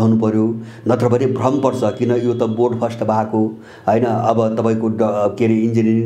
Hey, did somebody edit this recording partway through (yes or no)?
no